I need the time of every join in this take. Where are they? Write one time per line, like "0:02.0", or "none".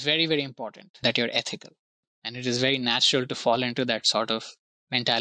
0:02.0

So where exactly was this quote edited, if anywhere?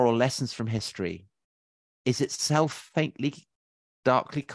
none

